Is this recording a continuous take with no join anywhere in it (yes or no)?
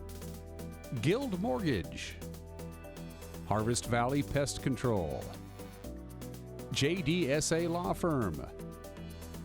no